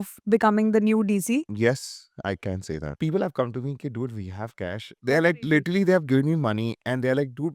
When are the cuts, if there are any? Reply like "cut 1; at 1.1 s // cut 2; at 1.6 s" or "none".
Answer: cut 1; at 1.5 s // cut 2; at 2.9 s // cut 3; at 5.0 s